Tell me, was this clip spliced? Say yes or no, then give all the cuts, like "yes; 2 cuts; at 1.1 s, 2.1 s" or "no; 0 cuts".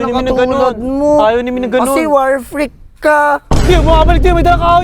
no; 0 cuts